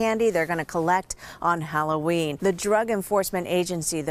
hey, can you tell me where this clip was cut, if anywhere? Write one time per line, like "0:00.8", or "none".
0:02.4